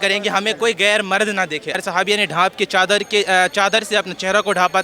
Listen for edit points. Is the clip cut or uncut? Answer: cut